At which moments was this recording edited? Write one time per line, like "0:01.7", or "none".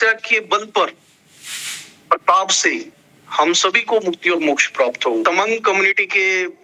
0:05.2